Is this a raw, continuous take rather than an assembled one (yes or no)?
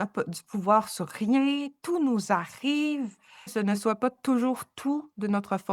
no